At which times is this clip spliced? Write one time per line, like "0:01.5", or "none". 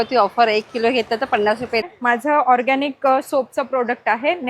0:01.8